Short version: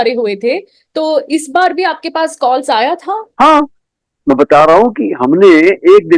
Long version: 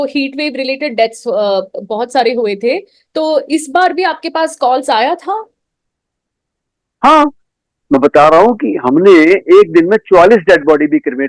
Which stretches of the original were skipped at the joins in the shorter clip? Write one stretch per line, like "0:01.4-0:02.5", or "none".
0:05.5-0:06.9